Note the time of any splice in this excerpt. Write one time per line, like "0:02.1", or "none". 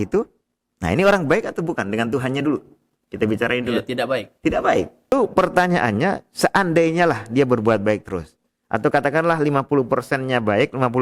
0:05.1